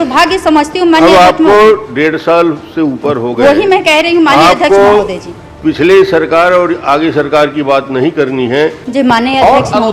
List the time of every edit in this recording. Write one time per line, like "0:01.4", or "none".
0:08.8